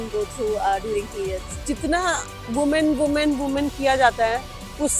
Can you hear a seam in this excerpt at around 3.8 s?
no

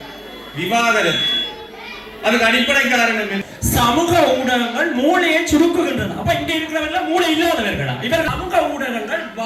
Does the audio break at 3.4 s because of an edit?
yes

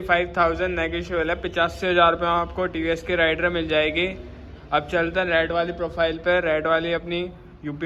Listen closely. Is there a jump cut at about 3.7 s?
no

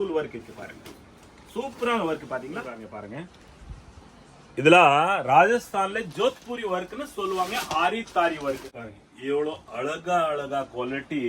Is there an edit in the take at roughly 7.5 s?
no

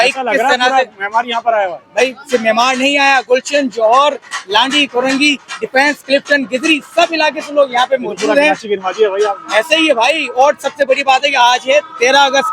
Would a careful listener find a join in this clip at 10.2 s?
no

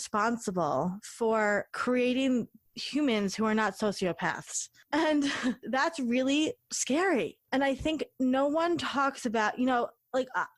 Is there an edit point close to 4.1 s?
no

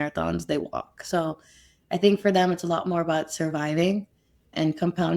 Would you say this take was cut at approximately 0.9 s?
no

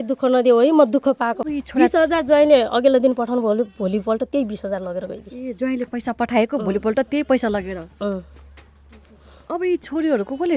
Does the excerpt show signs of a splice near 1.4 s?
yes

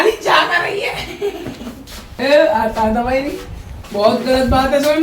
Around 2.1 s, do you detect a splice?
yes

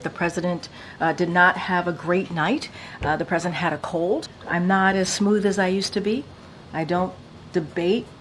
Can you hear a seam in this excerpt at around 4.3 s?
yes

